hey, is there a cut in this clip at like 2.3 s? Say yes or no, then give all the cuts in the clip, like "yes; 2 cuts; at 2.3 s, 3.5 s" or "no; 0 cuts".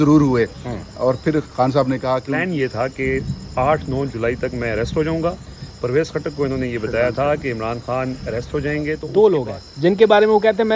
yes; 2 cuts; at 2.3 s, 9.0 s